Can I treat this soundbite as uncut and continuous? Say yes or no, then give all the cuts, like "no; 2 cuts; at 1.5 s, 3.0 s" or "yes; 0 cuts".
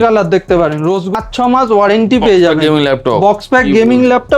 no; 1 cut; at 1.1 s